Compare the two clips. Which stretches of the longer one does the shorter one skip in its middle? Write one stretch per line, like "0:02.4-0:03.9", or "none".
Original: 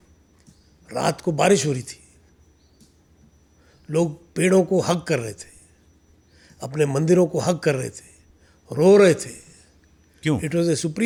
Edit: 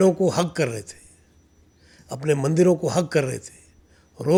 none